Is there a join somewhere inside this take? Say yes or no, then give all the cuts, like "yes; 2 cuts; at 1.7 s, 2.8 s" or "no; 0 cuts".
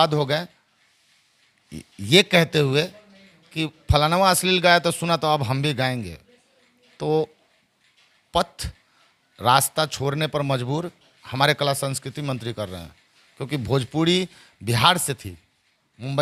no; 0 cuts